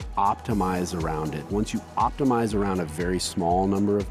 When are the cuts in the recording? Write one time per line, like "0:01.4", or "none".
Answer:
none

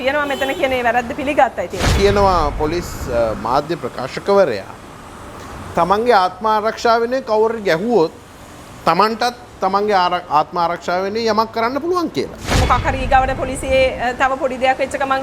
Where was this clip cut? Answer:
0:01.9
0:12.6

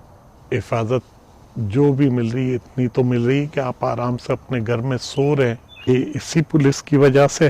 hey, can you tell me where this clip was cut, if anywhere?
0:05.9

